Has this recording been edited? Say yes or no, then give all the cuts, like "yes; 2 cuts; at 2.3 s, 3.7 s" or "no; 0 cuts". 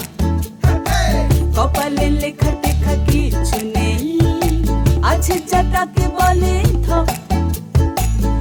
no; 0 cuts